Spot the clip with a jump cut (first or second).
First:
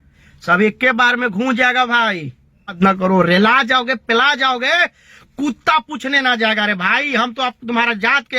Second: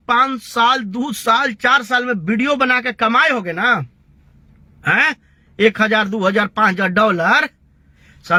first